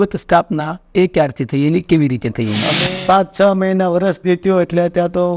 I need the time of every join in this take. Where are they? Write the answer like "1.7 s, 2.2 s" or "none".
2.7 s